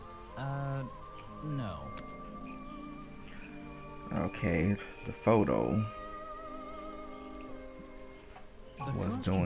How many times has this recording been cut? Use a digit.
1